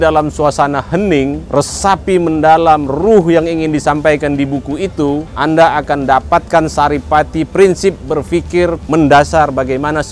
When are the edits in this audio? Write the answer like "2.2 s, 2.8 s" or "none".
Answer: 1.4 s, 5.3 s, 8.8 s